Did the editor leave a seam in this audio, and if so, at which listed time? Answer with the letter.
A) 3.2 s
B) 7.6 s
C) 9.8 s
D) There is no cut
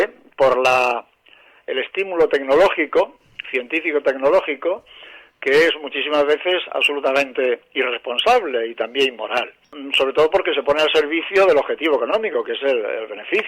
C